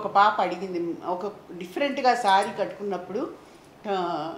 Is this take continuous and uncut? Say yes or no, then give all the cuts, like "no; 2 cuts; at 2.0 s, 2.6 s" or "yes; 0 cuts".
yes; 0 cuts